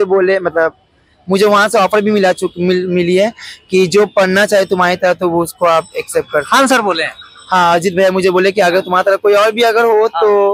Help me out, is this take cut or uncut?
uncut